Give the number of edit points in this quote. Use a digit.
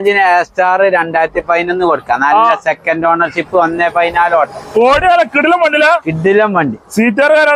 0